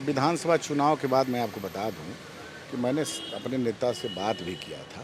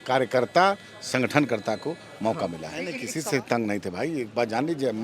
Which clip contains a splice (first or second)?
second